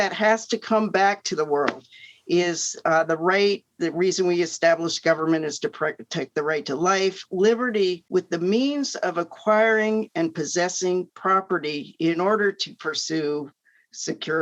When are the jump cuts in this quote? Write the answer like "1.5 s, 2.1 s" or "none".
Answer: 8.0 s